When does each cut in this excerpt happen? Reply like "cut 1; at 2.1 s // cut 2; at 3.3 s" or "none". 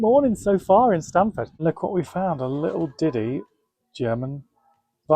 cut 1; at 1.5 s